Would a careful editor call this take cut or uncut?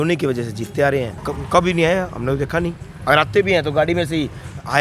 cut